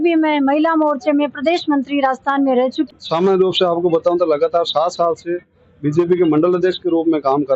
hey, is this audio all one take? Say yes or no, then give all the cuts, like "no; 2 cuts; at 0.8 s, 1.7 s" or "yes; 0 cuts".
no; 1 cut; at 2.9 s